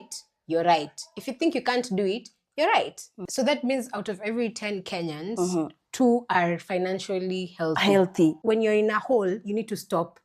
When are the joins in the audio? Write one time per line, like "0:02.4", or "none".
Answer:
0:03.2
0:08.4